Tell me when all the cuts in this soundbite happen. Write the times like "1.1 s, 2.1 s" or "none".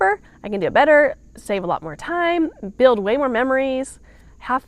none